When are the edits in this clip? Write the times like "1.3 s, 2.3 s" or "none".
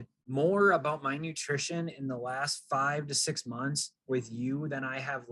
none

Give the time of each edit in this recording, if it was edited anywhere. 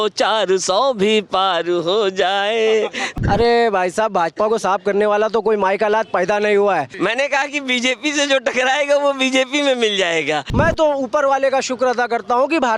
3.1 s, 6.9 s, 10.5 s

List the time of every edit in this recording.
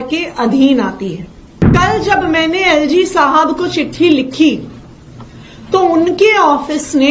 1.7 s

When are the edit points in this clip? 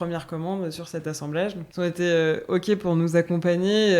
1.6 s

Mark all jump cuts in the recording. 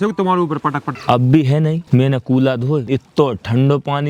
0.9 s, 1.8 s, 2.8 s

